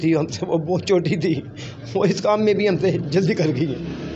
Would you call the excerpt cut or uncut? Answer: uncut